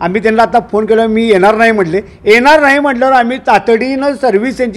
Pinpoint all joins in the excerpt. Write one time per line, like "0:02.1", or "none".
none

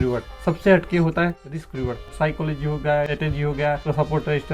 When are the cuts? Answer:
0:02.0
0:03.4

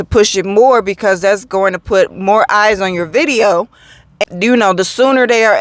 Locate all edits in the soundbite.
0:04.2

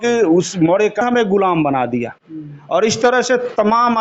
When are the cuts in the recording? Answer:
0:01.0

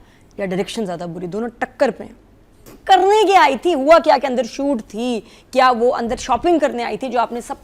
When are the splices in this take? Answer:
0:02.7

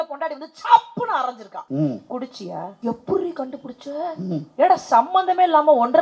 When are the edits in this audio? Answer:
0:01.5
0:02.7
0:04.5

